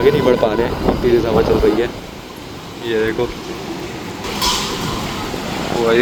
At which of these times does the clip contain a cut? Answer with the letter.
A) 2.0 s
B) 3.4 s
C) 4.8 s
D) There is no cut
D